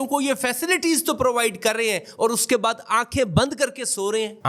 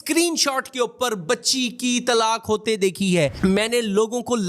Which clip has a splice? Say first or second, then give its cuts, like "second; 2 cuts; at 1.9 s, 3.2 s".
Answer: second; 1 cut; at 3.4 s